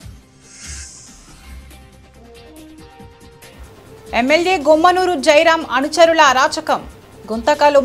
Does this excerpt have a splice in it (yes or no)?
no